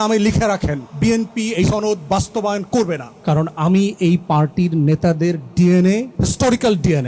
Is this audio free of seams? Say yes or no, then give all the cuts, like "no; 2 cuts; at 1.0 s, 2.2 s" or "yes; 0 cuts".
no; 4 cuts; at 0.8 s, 1.7 s, 3.1 s, 6.1 s